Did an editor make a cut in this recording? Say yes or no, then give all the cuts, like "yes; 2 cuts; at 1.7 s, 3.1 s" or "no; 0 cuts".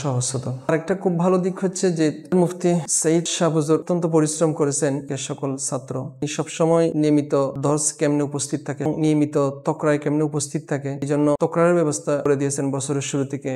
no; 0 cuts